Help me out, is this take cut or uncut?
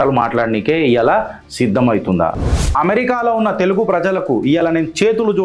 cut